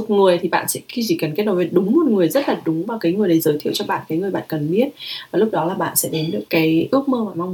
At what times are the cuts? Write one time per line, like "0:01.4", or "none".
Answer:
0:06.4